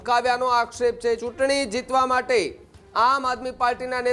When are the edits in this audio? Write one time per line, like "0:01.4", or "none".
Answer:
0:01.2